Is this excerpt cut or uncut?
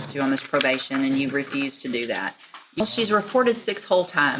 cut